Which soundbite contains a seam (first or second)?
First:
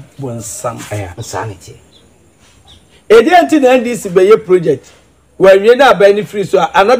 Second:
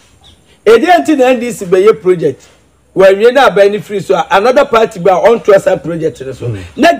first